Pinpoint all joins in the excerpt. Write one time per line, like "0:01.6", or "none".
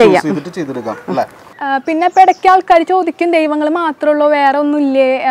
0:01.4